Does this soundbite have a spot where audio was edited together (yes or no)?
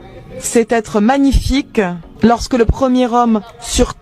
yes